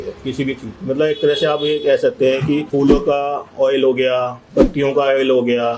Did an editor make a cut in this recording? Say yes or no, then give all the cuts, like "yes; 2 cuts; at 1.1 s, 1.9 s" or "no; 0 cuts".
yes; 1 cut; at 2.7 s